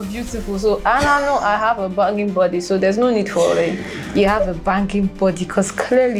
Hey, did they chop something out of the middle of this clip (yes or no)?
no